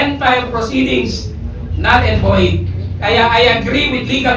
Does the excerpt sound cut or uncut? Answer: uncut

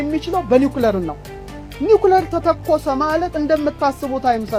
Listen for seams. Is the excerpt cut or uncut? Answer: uncut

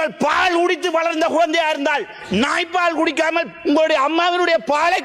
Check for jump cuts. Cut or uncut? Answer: uncut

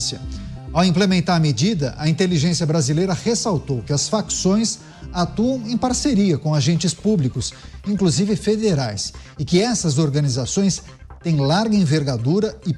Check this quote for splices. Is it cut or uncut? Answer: uncut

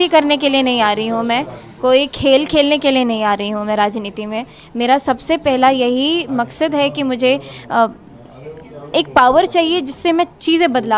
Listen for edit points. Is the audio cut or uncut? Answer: uncut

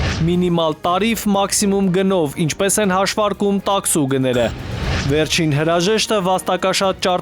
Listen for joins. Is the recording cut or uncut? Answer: cut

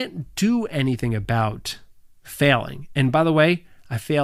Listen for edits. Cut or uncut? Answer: uncut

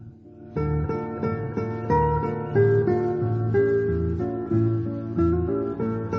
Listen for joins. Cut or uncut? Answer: uncut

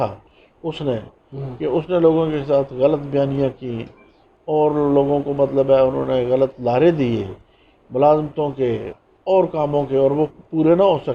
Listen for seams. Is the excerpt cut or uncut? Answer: uncut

